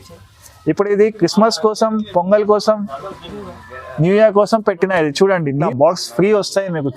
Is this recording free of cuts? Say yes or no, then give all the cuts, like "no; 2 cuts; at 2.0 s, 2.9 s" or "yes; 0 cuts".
no; 1 cut; at 5.6 s